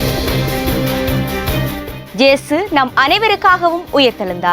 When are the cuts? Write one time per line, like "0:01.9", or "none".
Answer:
0:01.9